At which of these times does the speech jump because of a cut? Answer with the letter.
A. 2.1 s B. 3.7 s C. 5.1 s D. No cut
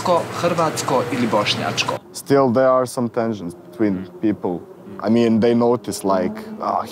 A